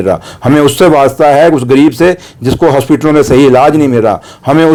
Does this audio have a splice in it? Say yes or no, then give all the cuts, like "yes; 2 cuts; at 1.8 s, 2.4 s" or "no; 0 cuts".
no; 0 cuts